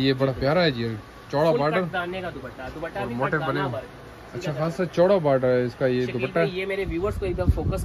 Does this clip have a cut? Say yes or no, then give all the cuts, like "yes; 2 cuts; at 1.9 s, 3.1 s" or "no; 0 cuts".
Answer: no; 0 cuts